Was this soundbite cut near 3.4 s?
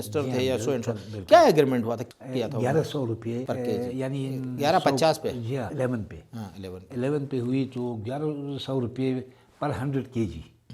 yes; 4 cuts; at 2.0 s, 3.4 s, 4.5 s, 5.7 s

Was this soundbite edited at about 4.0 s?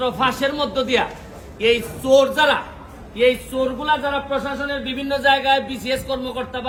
no; 0 cuts

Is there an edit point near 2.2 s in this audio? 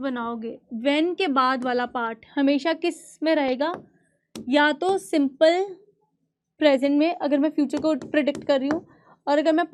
no; 0 cuts

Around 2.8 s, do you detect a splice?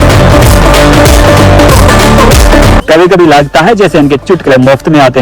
yes; 1 cut; at 2.8 s

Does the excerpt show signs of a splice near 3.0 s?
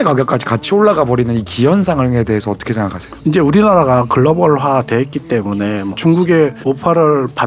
yes; 2 cuts; at 3.0 s, 5.9 s

